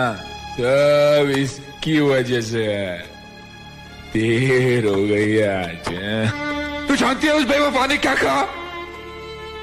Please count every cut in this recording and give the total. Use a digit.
1